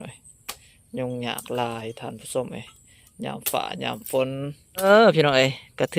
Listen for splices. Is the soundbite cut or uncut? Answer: cut